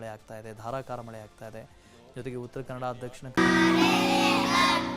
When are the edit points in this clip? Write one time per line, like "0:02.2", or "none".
none